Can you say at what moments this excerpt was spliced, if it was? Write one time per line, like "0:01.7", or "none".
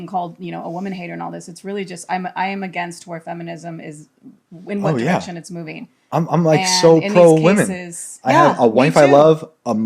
none